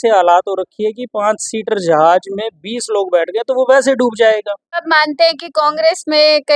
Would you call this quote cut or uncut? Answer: cut